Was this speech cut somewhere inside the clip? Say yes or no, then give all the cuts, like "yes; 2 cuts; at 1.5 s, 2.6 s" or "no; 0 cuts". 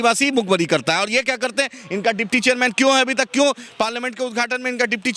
no; 0 cuts